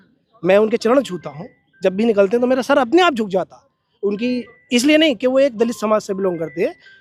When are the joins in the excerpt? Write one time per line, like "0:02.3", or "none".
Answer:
none